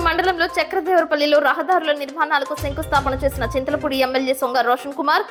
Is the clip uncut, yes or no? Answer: yes